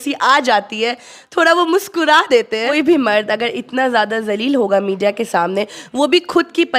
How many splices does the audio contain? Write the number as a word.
one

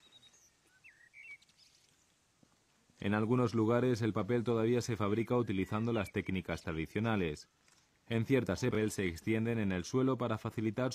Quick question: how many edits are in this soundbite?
one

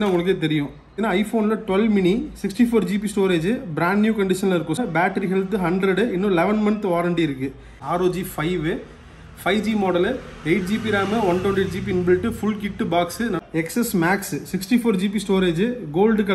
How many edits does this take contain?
four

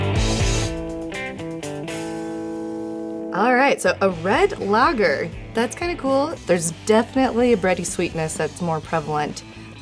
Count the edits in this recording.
one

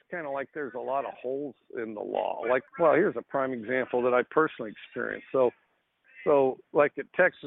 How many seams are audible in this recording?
one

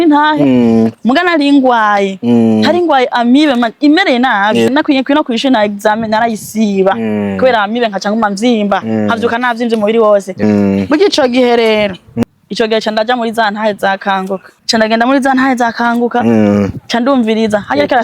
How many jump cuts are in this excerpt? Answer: four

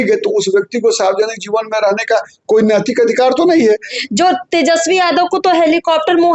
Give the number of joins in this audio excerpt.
one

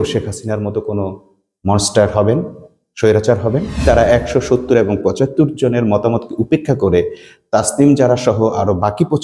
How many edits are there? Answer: one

